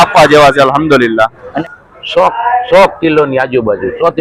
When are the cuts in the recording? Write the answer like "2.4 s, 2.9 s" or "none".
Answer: 1.6 s